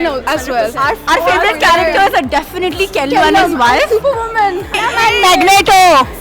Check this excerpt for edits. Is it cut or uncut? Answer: cut